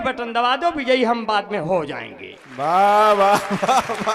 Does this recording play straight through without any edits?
yes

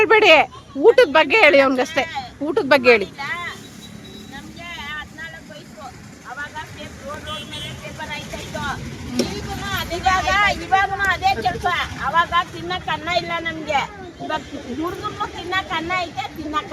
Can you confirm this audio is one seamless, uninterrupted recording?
yes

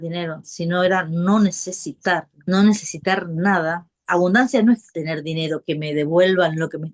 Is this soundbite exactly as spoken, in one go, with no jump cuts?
no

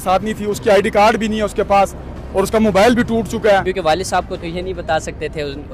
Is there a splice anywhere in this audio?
yes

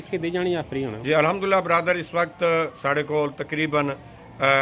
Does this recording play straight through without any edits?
yes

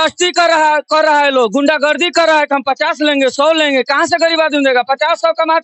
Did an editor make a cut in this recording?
no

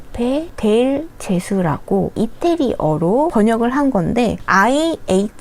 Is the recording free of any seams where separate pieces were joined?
yes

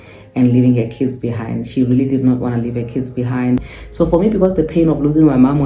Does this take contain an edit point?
yes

